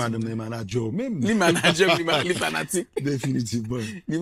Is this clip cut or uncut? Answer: uncut